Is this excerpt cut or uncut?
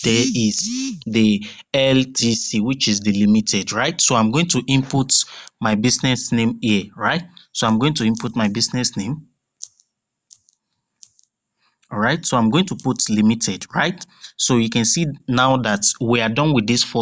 uncut